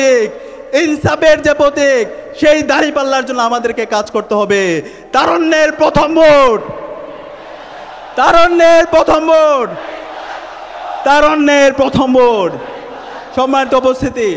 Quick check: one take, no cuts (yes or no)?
yes